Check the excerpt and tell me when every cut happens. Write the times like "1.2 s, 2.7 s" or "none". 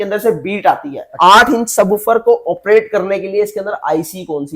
1.0 s